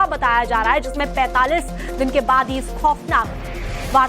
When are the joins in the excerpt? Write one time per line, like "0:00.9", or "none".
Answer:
0:02.1